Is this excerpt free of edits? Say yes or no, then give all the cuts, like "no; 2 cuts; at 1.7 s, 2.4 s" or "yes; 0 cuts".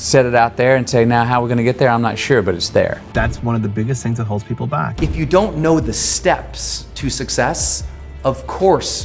no; 2 cuts; at 3.1 s, 4.9 s